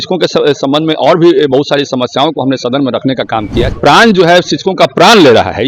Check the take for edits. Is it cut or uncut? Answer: cut